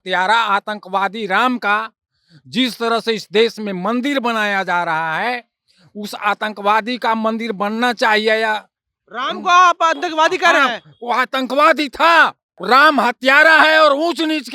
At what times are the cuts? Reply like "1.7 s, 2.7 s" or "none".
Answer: 12.5 s